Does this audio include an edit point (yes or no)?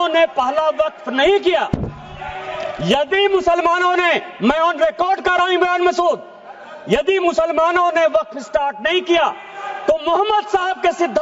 no